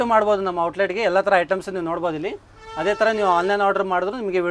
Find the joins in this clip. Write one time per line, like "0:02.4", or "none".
none